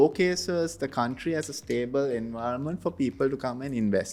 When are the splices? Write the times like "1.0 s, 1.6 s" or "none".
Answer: none